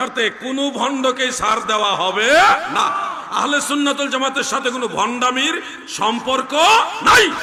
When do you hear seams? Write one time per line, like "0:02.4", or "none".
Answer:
none